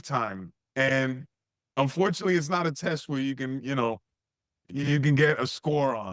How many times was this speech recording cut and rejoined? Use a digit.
0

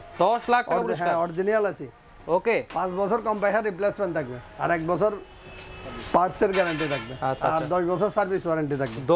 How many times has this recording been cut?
0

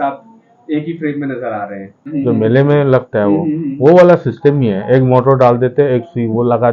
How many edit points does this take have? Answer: 1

